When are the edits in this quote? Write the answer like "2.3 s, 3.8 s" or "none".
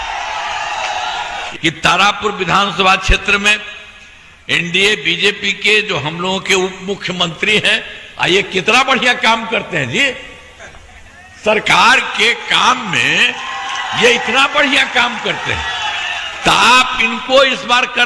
1.4 s